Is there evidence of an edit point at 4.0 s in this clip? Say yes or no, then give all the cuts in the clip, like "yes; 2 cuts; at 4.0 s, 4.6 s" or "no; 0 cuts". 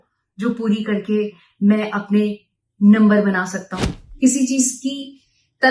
yes; 1 cut; at 4.0 s